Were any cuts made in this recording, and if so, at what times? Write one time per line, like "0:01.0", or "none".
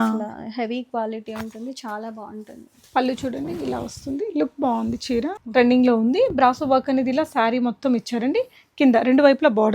0:05.4